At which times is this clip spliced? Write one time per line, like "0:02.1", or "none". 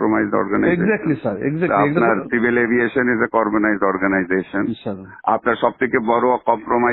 none